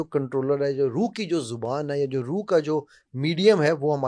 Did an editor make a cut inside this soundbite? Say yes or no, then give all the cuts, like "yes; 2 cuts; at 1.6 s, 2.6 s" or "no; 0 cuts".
no; 0 cuts